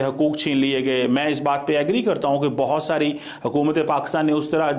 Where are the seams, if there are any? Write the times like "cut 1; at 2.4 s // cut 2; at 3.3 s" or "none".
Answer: none